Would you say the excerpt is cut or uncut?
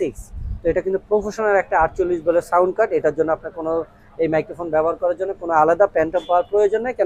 uncut